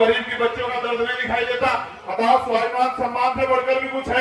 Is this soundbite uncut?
no; 1 cut; at 2.0 s

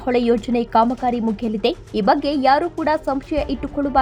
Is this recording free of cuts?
yes; 0 cuts

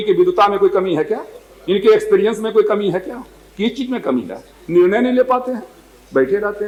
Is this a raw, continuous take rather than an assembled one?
yes; 0 cuts

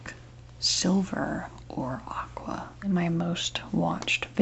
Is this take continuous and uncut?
no; 1 cut; at 2.9 s

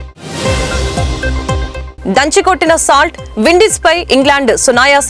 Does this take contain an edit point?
yes; 1 cut; at 1.8 s

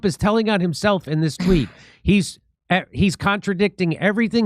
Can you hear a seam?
yes; 1 cut; at 2.0 s

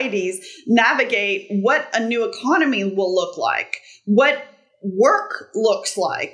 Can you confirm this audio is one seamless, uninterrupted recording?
yes; 0 cuts

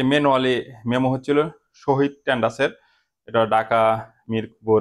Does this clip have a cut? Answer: no; 0 cuts

